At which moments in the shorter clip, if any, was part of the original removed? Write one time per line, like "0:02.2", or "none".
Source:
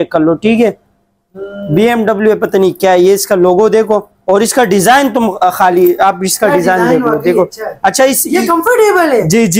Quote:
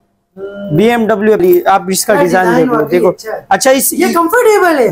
0:01.4